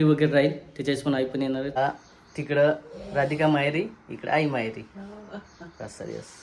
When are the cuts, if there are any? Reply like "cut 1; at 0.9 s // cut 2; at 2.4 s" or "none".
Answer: cut 1; at 1.8 s